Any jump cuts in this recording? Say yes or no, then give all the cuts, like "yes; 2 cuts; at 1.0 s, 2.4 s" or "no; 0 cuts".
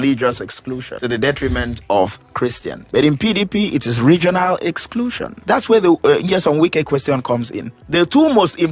yes; 4 cuts; at 0.9 s, 2.7 s, 5.4 s, 7.8 s